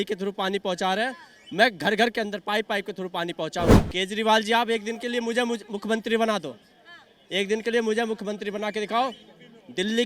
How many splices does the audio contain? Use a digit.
1